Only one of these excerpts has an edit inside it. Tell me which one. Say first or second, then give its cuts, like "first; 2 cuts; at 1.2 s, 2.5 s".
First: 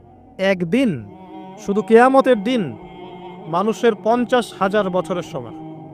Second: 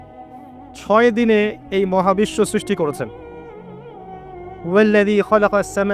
second; 2 cuts; at 3.1 s, 4.6 s